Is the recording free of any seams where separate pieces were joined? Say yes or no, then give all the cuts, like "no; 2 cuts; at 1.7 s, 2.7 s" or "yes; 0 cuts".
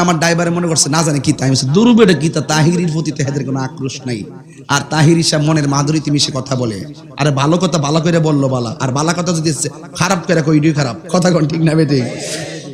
yes; 0 cuts